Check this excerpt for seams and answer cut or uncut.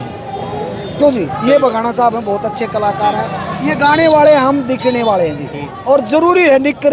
cut